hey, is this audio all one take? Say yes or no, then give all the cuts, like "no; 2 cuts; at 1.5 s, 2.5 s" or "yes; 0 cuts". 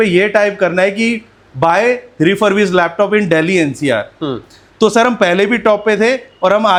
yes; 0 cuts